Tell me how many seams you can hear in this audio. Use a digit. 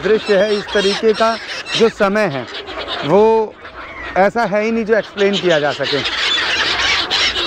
0